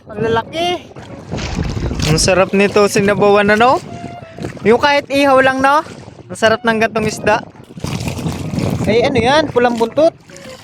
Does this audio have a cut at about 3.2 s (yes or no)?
no